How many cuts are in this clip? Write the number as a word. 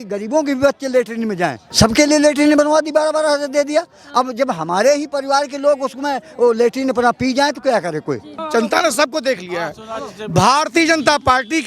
one